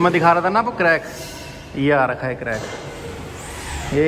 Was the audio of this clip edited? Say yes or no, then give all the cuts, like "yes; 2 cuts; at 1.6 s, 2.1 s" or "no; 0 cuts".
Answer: no; 0 cuts